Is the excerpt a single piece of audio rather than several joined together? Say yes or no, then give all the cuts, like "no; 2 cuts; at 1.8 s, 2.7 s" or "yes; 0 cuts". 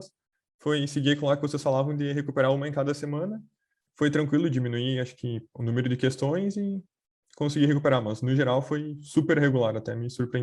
yes; 0 cuts